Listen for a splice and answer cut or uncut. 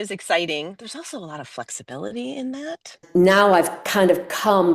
cut